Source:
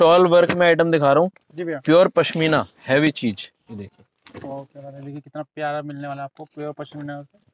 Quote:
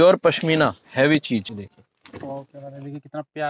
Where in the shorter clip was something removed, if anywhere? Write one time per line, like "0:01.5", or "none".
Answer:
0:01.5